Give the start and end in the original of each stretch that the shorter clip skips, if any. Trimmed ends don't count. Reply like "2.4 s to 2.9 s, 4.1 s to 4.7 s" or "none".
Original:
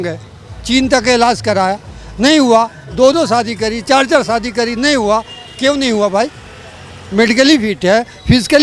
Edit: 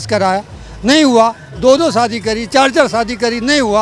none